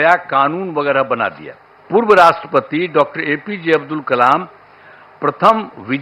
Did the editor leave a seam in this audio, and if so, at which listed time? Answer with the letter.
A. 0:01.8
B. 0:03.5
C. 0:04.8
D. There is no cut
A